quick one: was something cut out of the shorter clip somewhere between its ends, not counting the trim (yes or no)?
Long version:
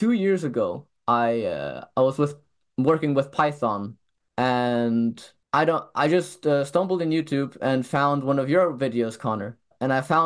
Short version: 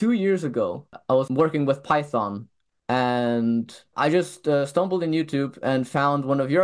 yes